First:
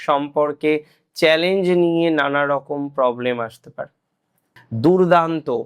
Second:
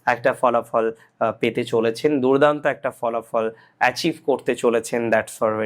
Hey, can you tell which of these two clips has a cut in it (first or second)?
first